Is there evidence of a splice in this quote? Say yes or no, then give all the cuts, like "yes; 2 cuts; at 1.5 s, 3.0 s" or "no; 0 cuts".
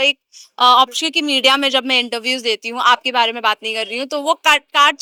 no; 0 cuts